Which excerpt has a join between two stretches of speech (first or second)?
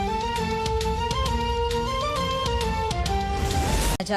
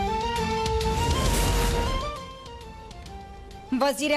second